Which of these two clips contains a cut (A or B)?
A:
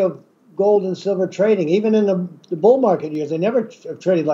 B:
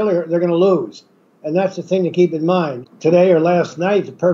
B